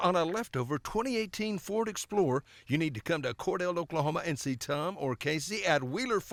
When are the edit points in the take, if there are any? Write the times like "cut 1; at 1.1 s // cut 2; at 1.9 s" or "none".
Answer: none